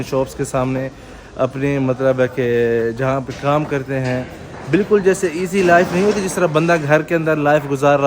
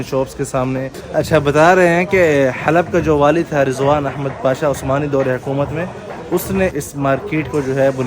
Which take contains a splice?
second; 2 cuts; at 1.0 s, 6.7 s

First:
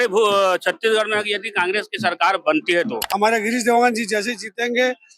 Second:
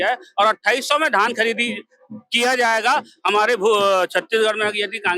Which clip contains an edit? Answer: first; 1 cut; at 3.0 s

